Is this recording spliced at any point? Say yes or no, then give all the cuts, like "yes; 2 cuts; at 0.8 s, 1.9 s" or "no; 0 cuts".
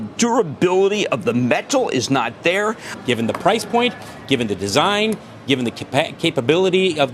yes; 1 cut; at 2.9 s